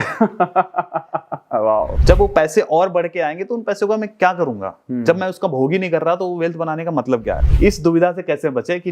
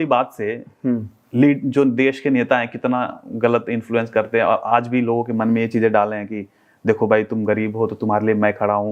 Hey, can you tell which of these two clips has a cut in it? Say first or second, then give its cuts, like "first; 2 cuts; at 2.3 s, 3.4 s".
first; 2 cuts; at 2.0 s, 7.4 s